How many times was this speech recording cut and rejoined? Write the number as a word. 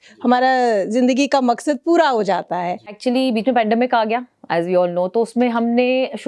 one